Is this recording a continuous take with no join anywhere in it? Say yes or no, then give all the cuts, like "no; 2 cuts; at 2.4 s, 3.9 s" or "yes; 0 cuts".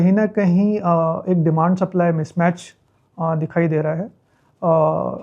yes; 0 cuts